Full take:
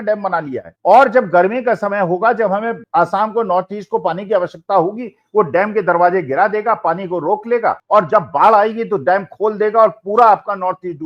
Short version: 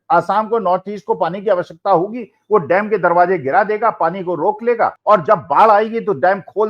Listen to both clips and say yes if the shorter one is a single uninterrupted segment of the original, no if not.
yes